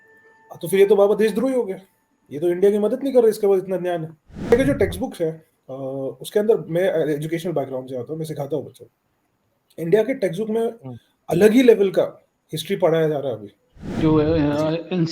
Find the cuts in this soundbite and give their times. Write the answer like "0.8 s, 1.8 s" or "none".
4.5 s, 14.0 s